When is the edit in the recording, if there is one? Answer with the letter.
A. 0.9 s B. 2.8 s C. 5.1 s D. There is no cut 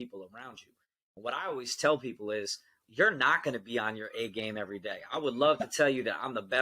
B